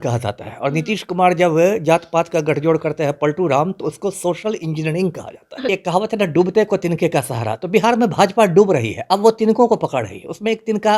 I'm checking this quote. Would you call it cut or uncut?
cut